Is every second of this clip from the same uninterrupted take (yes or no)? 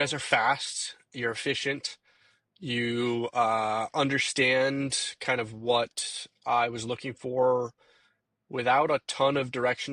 yes